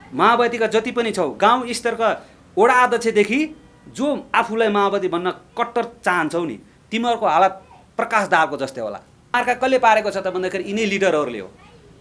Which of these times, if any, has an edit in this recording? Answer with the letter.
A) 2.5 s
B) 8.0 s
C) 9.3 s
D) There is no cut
C